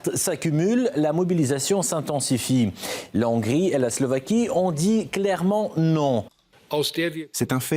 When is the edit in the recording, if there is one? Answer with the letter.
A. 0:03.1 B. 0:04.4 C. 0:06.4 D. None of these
C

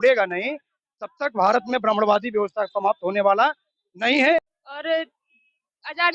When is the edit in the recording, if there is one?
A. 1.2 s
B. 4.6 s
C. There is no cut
B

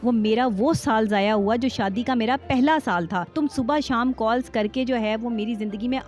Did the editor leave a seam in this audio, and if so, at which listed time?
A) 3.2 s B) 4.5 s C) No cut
A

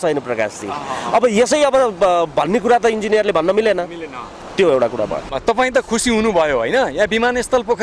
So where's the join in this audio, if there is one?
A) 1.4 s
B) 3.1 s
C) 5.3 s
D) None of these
C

